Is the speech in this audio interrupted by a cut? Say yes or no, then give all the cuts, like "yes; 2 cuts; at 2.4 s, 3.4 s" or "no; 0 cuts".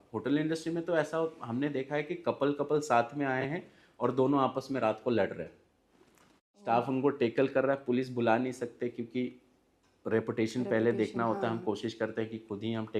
no; 0 cuts